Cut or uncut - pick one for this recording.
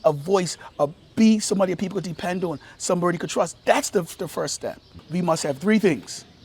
cut